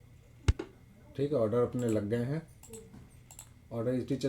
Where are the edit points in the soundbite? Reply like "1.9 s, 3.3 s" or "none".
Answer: none